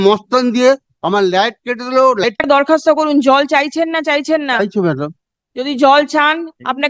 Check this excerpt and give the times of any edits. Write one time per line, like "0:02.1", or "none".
0:02.4